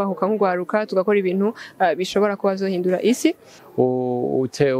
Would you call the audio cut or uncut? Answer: cut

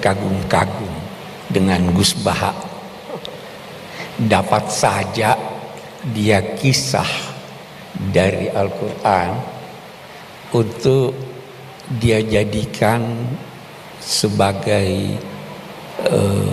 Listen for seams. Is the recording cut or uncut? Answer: uncut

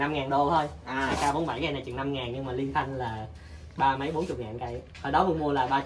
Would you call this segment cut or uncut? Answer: uncut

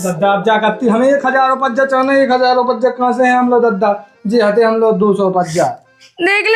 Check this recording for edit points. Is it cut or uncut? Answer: uncut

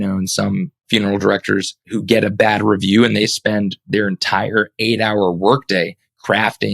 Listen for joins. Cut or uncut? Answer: cut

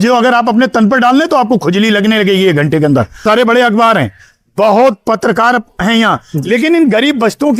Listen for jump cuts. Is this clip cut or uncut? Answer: cut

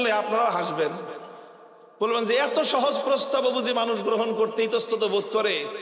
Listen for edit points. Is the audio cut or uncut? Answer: uncut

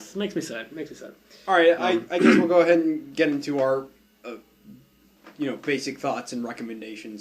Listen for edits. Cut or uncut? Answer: cut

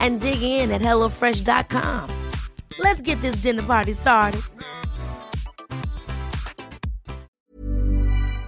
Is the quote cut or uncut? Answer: cut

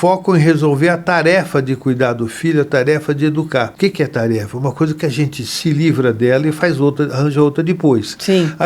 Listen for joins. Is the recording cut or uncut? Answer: cut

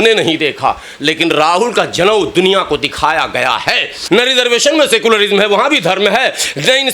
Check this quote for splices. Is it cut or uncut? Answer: cut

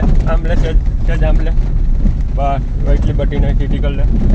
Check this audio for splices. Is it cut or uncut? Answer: uncut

